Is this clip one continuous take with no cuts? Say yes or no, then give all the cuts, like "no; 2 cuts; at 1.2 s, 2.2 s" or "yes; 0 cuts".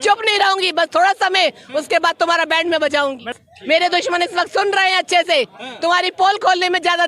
no; 1 cut; at 3.3 s